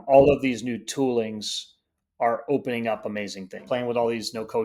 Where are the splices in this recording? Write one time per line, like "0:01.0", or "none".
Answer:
0:03.7